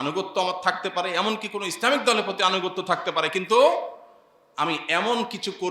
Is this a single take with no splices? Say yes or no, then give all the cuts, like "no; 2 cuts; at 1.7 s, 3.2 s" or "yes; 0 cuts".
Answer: yes; 0 cuts